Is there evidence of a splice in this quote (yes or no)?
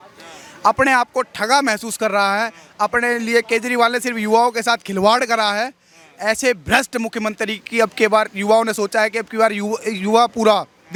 no